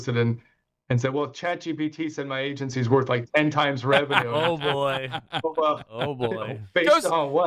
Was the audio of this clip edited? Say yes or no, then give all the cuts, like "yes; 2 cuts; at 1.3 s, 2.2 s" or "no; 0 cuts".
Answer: no; 0 cuts